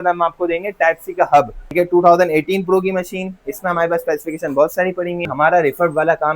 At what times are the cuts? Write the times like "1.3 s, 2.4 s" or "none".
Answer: 1.6 s, 5.3 s